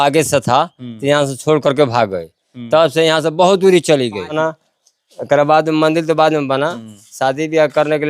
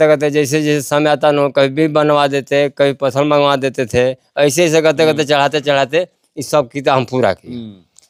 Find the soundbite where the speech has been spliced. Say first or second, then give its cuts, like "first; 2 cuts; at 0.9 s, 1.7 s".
first; 1 cut; at 4.4 s